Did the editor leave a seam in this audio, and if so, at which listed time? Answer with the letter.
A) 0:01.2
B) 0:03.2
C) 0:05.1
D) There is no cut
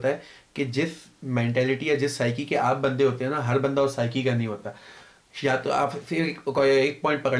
D